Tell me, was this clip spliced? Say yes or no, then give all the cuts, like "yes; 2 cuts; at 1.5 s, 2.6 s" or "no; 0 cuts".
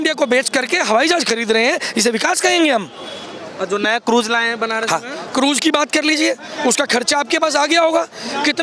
no; 0 cuts